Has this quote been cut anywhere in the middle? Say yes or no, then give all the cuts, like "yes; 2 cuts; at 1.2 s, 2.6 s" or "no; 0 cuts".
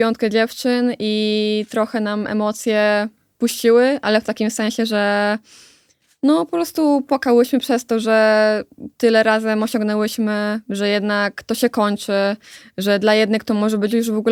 no; 0 cuts